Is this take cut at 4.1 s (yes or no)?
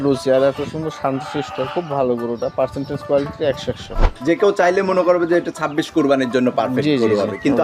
yes